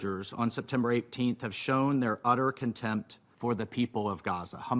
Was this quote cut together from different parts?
yes; 1 cut; at 3.2 s

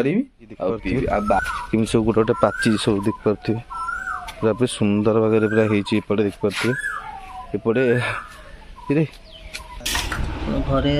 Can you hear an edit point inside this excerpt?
yes; 2 cuts; at 1.4 s, 10.1 s

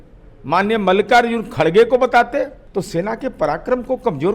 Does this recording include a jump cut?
yes; 1 cut; at 2.6 s

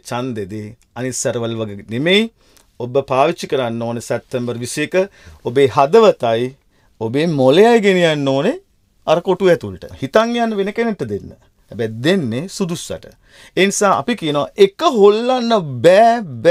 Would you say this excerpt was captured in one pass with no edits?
no; 1 cut; at 9.9 s

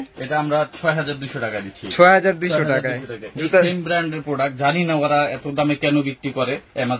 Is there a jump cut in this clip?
no; 0 cuts

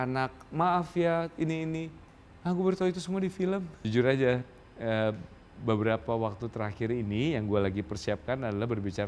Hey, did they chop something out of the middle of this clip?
yes; 1 cut; at 3.7 s

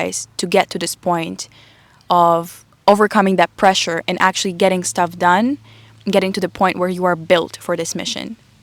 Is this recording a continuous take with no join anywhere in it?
yes; 0 cuts

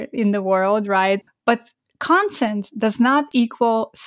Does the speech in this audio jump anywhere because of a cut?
yes; 1 cut; at 1.3 s

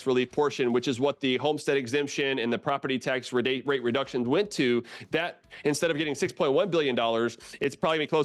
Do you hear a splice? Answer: no; 0 cuts

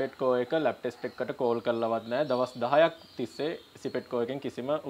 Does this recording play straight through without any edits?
yes; 0 cuts

